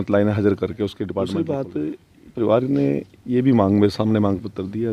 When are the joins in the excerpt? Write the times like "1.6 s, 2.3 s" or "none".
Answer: 1.3 s